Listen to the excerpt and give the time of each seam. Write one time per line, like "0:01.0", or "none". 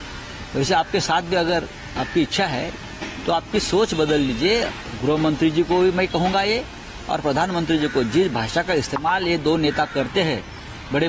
none

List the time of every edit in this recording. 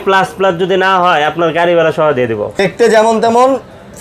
0:02.6

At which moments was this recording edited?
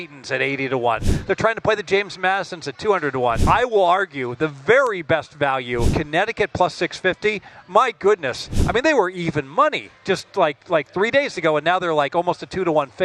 0:03.4
0:05.9

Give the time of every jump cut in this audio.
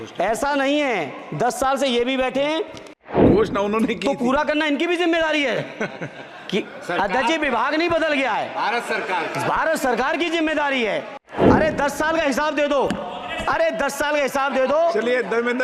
0:03.1
0:11.2

